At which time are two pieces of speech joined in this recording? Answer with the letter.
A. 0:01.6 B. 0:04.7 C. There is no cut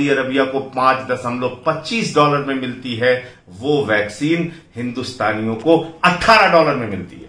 C